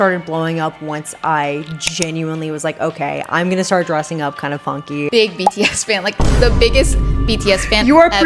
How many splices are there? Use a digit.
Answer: 1